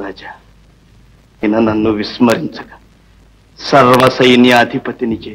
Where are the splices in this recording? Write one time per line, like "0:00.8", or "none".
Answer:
0:01.4